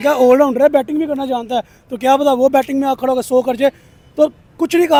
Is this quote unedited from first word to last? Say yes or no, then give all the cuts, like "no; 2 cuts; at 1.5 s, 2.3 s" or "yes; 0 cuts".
yes; 0 cuts